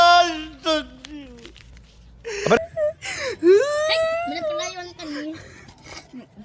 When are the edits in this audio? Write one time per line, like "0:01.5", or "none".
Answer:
none